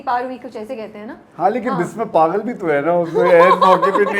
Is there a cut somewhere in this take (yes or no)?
no